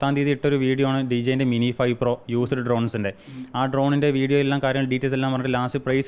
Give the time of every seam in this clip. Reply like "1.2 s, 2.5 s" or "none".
none